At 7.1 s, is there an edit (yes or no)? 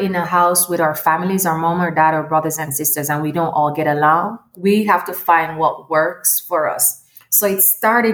no